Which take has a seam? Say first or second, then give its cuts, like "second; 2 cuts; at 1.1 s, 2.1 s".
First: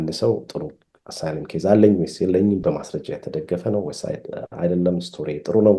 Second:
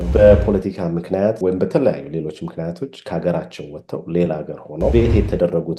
second; 2 cuts; at 1.4 s, 4.9 s